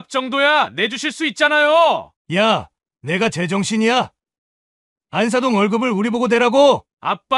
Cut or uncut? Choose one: cut